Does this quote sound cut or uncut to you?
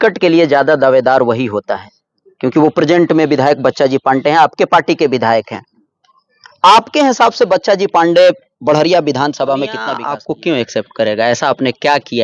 cut